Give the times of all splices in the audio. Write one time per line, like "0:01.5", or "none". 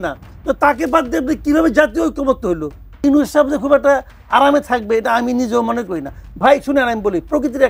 0:03.0